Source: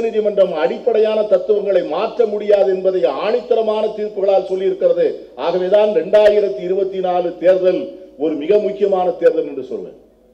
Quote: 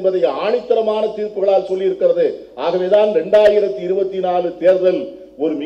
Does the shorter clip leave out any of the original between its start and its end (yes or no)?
no